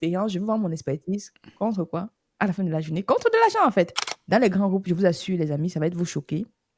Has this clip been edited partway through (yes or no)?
yes